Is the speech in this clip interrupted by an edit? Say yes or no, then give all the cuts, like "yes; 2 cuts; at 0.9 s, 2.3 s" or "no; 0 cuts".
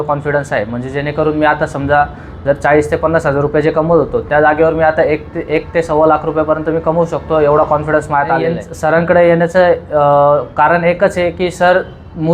yes; 1 cut; at 8.6 s